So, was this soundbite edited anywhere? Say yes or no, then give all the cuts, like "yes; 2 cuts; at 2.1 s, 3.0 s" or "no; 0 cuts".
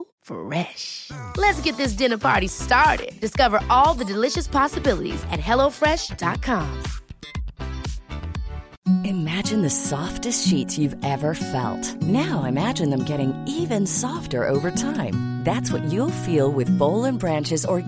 yes; 1 cut; at 8.6 s